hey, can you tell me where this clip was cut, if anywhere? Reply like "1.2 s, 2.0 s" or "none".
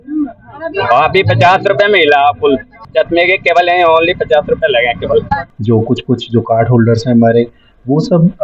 2.8 s, 5.5 s

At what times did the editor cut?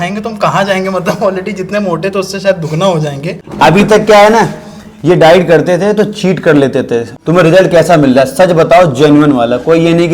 3.4 s, 7.1 s

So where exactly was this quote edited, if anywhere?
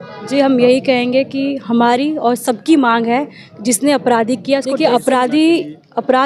4.8 s

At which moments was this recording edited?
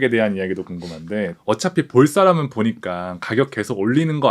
1.3 s

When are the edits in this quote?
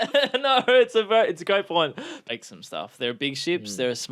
2.3 s

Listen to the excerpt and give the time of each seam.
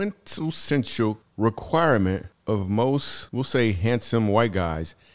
1.2 s, 2.3 s, 3.2 s

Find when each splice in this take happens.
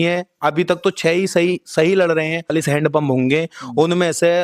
2.5 s

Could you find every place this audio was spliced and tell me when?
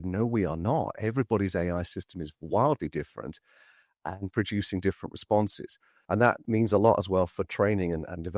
6.3 s

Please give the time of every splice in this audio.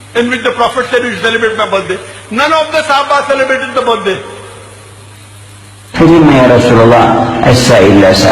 5.8 s

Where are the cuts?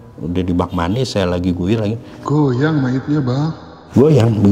none

